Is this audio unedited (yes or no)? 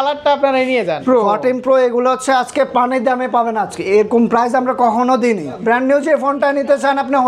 no